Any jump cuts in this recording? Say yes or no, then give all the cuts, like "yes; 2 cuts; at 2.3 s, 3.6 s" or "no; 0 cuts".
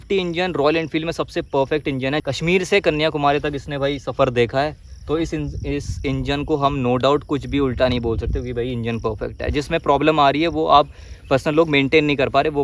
no; 0 cuts